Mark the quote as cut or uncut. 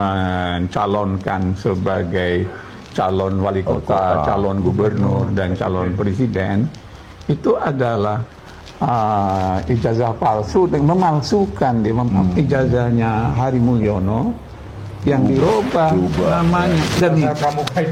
uncut